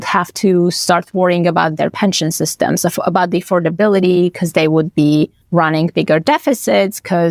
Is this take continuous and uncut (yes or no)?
yes